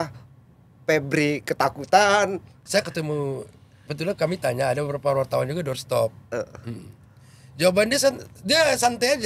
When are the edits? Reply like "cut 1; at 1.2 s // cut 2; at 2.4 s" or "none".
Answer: cut 1; at 2.6 s